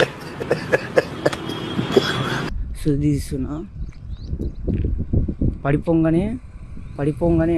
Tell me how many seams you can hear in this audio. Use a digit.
1